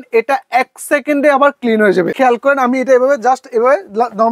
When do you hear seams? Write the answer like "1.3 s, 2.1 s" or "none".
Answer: 2.1 s